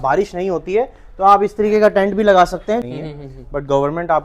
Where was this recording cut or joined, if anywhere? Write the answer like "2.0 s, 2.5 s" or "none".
2.9 s